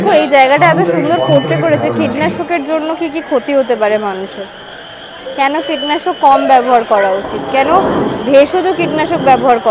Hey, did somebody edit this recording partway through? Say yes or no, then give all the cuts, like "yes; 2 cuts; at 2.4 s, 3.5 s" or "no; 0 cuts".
no; 0 cuts